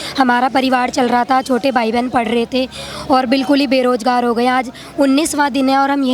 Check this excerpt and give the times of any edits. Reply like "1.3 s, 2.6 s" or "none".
none